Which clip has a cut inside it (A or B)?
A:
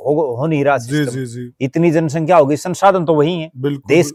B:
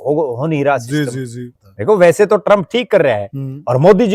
B